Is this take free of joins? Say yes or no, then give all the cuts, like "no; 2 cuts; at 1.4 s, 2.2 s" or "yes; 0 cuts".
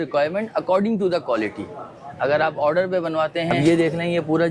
no; 1 cut; at 3.6 s